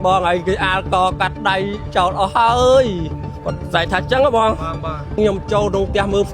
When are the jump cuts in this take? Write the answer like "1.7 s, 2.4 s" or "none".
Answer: 5.2 s